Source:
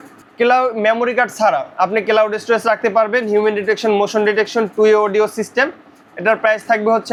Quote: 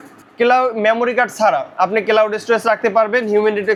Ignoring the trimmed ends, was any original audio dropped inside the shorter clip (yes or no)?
no